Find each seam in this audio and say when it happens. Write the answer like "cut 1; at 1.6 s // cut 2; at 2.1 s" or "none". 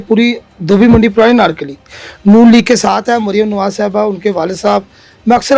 none